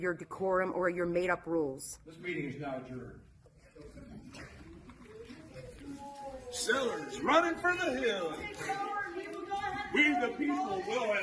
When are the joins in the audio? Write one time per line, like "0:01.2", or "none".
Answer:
none